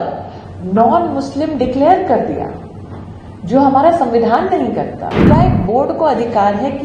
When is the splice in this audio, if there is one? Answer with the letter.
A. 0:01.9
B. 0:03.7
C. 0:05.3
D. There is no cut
C